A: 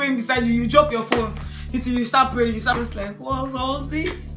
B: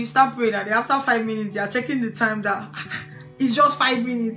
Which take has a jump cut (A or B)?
A